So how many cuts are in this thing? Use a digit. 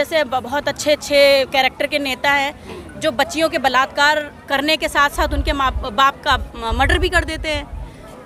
0